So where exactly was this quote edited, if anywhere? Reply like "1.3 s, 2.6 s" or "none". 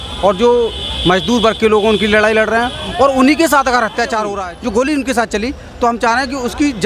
4.3 s